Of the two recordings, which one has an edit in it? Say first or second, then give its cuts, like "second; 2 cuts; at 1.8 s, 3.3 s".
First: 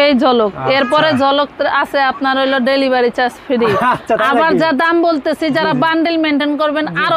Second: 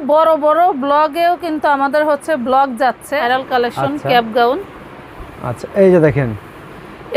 second; 1 cut; at 3.2 s